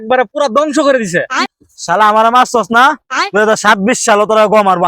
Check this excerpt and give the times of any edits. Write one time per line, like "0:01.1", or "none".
0:01.5